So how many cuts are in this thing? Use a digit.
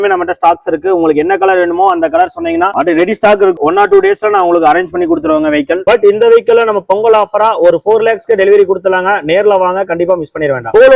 1